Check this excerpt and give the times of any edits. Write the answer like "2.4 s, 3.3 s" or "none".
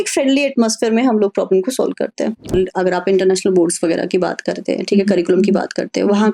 2.5 s